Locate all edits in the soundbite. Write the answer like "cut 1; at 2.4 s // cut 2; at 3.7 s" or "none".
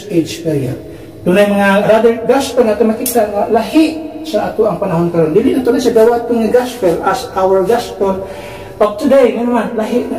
cut 1; at 1.8 s